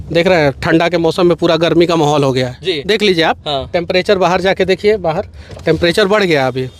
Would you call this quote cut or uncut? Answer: uncut